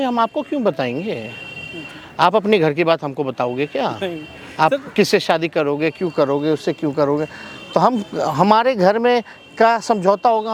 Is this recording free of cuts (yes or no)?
yes